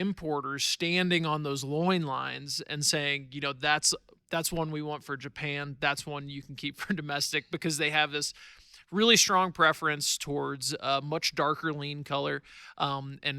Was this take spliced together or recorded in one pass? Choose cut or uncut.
uncut